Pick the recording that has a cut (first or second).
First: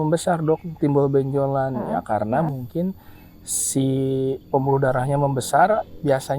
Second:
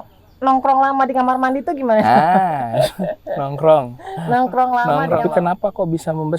second